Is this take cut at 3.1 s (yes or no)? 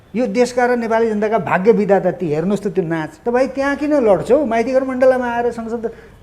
yes